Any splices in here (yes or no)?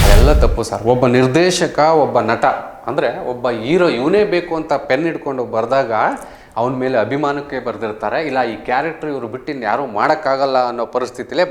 no